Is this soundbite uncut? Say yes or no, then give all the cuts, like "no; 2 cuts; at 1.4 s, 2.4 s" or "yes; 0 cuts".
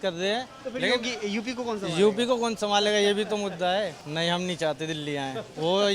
no; 1 cut; at 4.0 s